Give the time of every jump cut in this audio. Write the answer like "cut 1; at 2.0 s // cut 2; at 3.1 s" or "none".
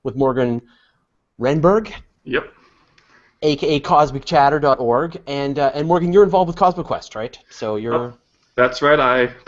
none